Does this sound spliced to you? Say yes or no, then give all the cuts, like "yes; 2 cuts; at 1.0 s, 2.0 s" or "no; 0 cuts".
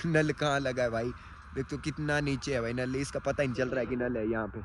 no; 0 cuts